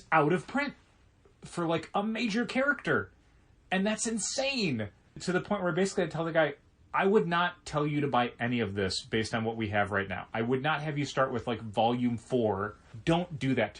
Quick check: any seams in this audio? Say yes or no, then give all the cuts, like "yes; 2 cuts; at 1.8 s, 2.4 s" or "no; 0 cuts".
yes; 2 cuts; at 5.2 s, 12.9 s